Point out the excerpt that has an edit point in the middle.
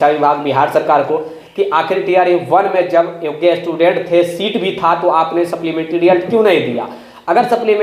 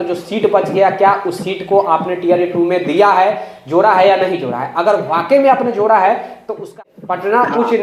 second; 1 cut; at 6.7 s

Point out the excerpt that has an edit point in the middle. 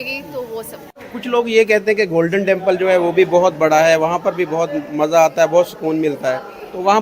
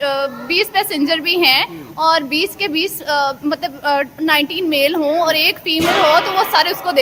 first; 1 cut; at 1.0 s

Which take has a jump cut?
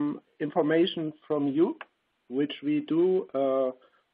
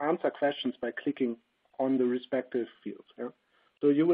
first; 1 cut; at 3.0 s

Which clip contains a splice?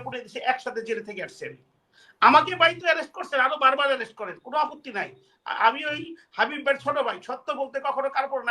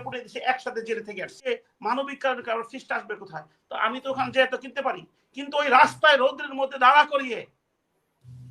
second; 1 cut; at 1.5 s

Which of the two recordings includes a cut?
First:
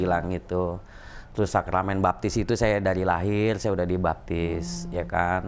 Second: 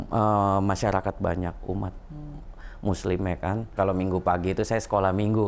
second; 1 cut; at 3.7 s

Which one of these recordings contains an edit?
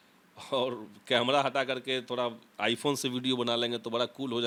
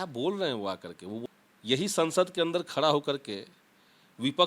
second; 1 cut; at 1.2 s

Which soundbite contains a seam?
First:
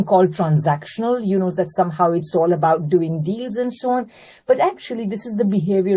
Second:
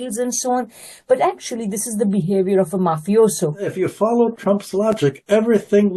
second; 1 cut; at 3.6 s

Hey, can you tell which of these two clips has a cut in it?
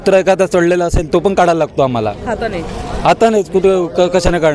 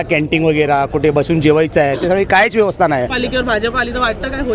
second; 1 cut; at 3.1 s

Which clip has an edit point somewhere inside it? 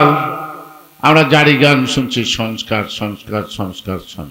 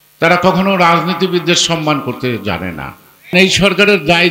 second; 1 cut; at 3.3 s

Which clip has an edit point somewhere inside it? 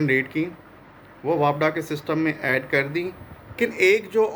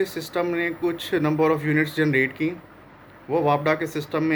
first; 1 cut; at 3.4 s

